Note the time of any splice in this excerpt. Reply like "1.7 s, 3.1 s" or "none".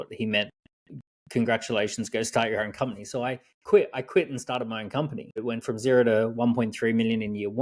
5.4 s